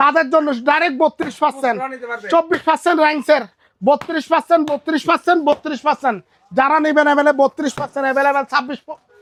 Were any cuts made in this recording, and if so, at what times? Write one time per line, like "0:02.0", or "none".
none